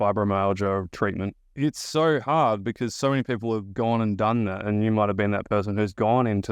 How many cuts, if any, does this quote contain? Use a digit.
1